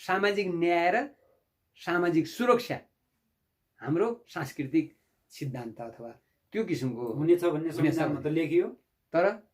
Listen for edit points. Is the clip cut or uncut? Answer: uncut